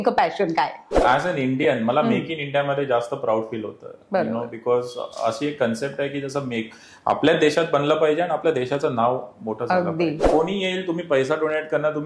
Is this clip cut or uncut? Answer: cut